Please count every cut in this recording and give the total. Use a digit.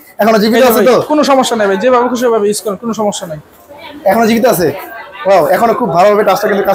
0